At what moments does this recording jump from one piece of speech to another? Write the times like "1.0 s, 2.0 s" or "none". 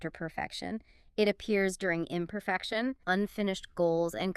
3.0 s